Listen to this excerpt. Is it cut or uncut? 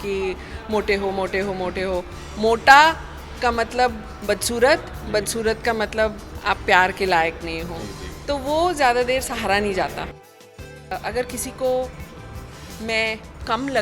cut